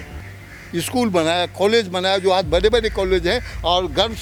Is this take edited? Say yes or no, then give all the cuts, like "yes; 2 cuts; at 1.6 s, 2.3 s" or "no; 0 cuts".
no; 0 cuts